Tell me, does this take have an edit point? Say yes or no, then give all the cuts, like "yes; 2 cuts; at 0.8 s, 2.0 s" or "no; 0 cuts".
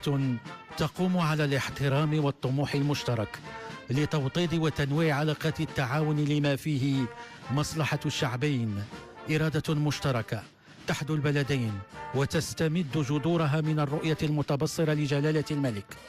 yes; 1 cut; at 6.2 s